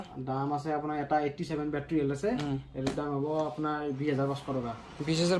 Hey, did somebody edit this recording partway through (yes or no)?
no